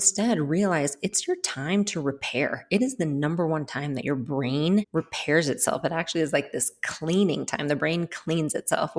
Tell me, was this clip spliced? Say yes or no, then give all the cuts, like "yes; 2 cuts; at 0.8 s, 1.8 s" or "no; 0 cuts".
yes; 1 cut; at 4.9 s